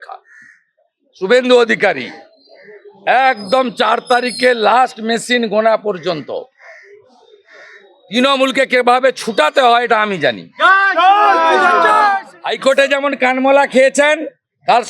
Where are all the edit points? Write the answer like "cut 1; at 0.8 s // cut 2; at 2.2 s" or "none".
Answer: cut 1; at 12.2 s